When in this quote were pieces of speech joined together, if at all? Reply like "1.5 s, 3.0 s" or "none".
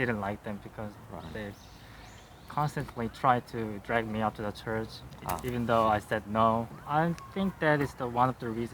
6.8 s